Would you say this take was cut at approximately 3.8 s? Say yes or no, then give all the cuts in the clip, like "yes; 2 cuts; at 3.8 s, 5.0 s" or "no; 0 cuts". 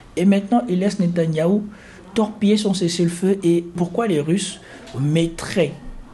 yes; 1 cut; at 3.8 s